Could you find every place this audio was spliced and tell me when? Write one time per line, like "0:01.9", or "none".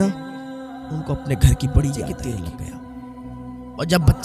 0:02.1